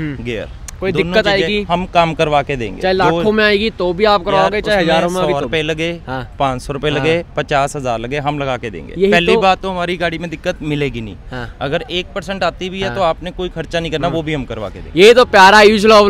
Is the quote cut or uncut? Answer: uncut